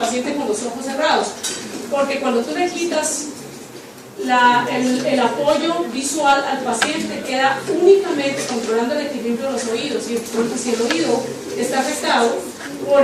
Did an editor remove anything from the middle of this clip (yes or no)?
yes